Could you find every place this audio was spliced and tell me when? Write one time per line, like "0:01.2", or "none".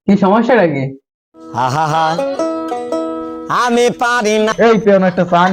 0:04.5